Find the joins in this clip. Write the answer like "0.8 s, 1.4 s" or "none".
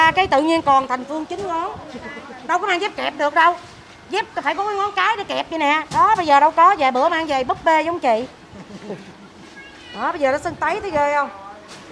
none